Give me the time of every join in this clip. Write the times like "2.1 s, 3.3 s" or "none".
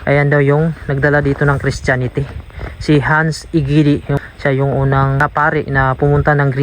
4.2 s, 5.2 s